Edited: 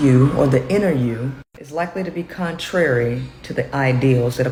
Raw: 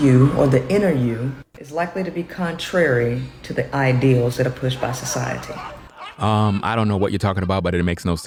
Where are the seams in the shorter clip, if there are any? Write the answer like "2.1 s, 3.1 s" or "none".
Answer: none